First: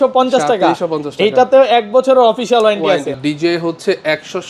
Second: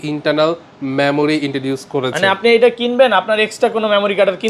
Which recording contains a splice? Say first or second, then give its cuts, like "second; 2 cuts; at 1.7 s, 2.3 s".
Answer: first; 1 cut; at 3.2 s